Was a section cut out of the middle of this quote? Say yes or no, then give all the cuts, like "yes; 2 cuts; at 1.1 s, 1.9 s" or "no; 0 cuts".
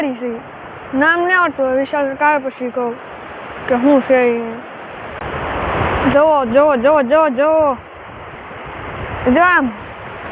yes; 1 cut; at 5.0 s